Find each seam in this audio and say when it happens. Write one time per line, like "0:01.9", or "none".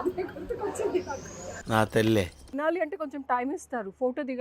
0:02.5